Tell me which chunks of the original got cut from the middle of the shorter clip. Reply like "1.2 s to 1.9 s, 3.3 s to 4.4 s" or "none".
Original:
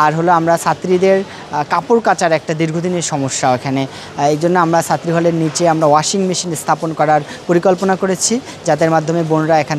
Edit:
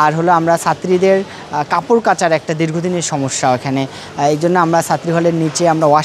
none

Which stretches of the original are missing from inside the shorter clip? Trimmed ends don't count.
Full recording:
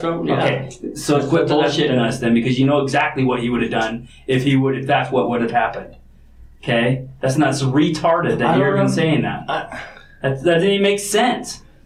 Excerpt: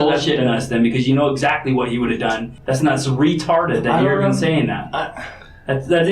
4.0 s to 7.1 s

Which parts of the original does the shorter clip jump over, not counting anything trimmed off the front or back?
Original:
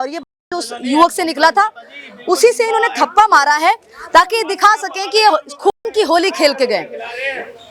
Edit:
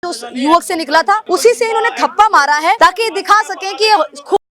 1.7 s to 2.2 s, 3.8 s to 4.1 s

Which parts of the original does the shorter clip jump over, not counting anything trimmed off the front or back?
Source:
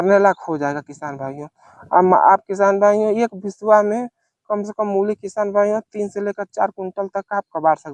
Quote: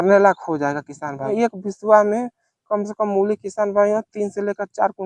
1.3 s to 3.1 s

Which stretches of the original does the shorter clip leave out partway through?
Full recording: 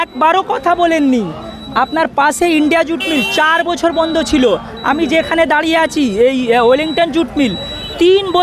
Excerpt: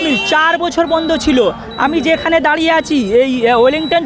none

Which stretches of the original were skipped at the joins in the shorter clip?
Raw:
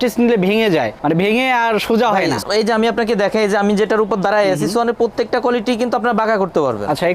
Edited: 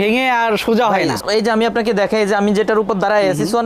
none

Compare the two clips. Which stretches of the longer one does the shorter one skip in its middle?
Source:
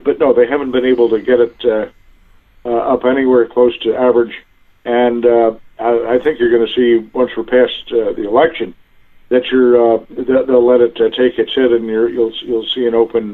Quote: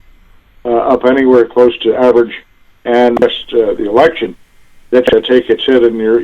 5.2 s to 7.6 s, 9.5 s to 11.0 s

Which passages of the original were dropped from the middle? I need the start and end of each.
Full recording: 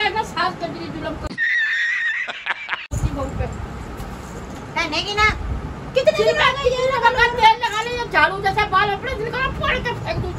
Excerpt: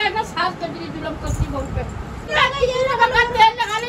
1.3 s to 2.9 s, 4.0 s to 6.4 s

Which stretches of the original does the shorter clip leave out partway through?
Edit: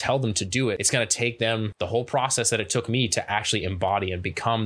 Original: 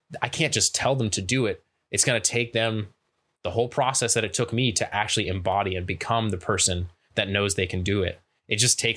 1.6 s to 2.0 s, 2.8 s to 3.3 s

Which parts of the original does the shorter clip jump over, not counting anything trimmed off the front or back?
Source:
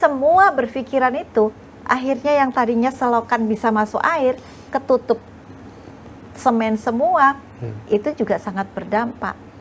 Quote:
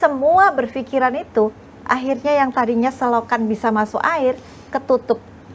none

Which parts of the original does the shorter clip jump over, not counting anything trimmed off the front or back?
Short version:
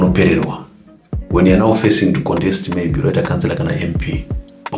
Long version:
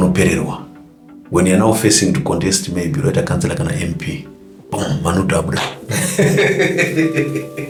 none

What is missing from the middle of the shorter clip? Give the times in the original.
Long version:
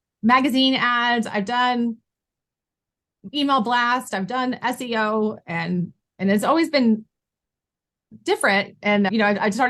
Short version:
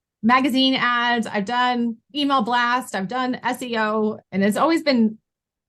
2.0 s to 3.2 s, 5.4 s to 6.1 s

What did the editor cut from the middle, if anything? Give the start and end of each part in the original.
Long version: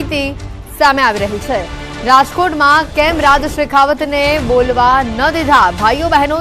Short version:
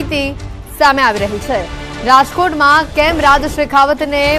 none

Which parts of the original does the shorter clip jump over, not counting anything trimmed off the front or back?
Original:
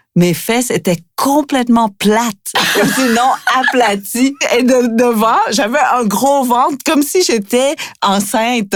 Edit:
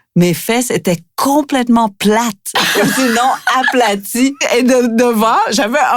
none

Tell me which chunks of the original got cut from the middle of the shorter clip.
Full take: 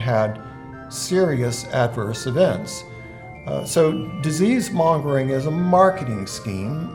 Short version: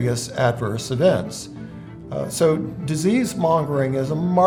none

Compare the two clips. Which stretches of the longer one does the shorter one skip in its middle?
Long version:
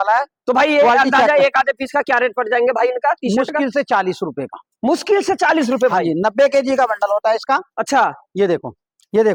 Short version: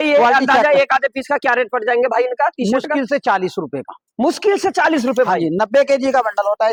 none

